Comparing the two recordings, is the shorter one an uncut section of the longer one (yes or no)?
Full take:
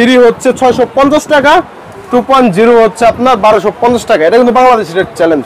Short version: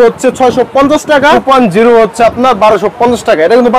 no